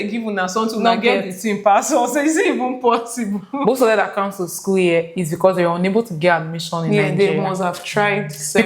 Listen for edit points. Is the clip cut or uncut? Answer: cut